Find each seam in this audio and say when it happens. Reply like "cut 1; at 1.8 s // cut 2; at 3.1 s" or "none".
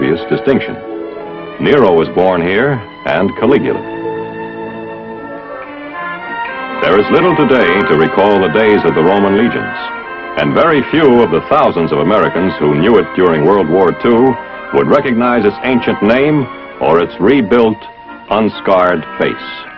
none